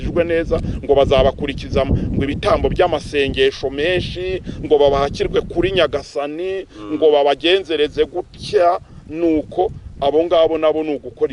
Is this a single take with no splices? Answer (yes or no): yes